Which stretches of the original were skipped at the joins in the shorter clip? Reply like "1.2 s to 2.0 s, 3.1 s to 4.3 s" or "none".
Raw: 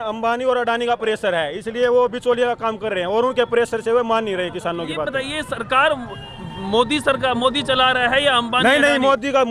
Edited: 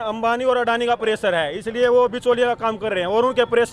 none